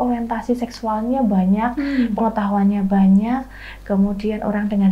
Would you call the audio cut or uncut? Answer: uncut